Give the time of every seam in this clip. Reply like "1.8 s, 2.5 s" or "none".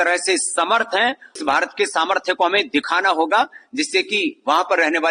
1.4 s

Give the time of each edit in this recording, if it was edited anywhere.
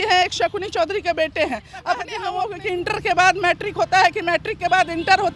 2.2 s

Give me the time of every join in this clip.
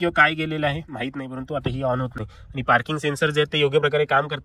none

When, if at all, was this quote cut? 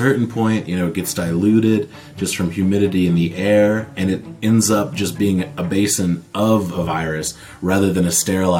none

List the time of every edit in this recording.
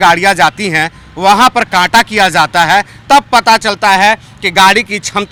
none

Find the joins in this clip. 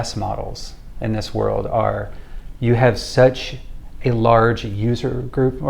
none

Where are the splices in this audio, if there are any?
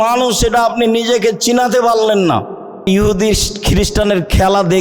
2.9 s

